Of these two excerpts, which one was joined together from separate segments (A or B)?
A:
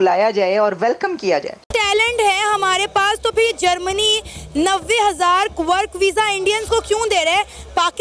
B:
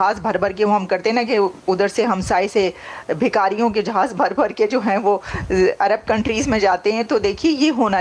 A